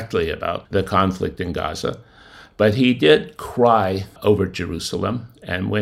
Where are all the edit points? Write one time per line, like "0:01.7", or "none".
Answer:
none